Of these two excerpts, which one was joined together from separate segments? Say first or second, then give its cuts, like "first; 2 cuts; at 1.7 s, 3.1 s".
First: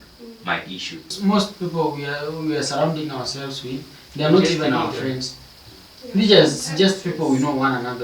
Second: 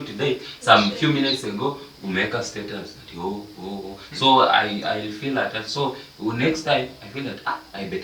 first; 1 cut; at 1.1 s